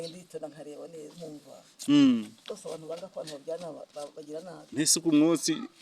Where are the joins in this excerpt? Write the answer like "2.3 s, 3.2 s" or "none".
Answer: none